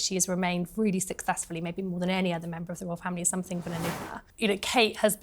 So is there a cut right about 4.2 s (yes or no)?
yes